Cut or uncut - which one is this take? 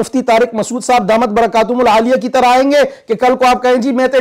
uncut